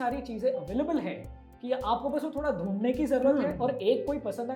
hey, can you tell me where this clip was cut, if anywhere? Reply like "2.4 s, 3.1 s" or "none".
none

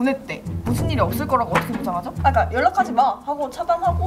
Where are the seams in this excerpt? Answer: 2.1 s

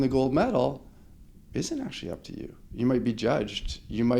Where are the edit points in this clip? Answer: none

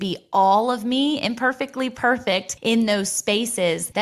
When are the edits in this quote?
2.5 s

